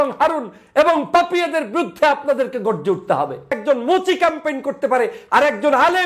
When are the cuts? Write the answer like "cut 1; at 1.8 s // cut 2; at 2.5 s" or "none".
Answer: cut 1; at 3.6 s